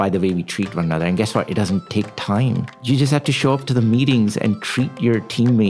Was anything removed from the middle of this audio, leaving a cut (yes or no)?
yes